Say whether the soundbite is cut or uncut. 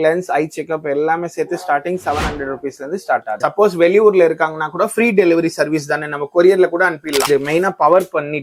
cut